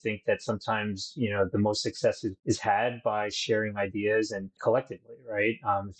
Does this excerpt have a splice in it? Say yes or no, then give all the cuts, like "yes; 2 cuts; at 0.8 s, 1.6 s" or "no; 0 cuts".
no; 0 cuts